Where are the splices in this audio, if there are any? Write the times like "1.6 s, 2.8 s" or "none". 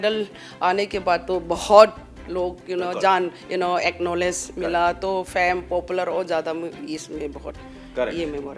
none

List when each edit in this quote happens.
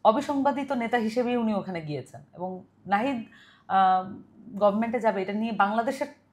none

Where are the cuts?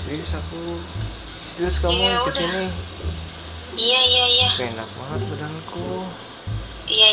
none

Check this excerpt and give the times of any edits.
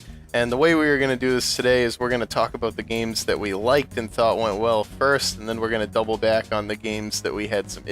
5.1 s

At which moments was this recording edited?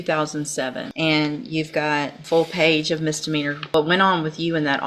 0.9 s, 2.2 s, 3.6 s

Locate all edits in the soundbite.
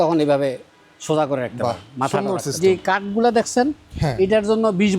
2.6 s

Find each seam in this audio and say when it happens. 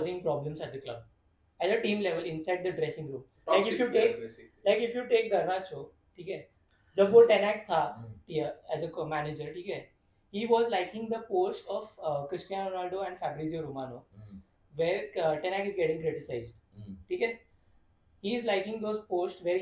none

